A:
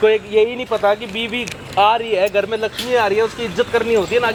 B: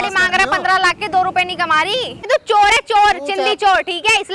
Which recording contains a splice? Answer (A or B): B